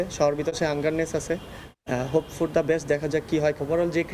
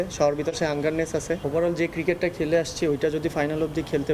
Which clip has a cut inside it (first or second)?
second